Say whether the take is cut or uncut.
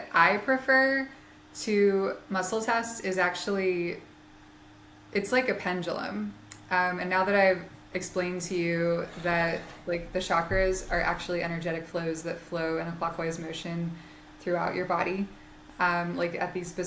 uncut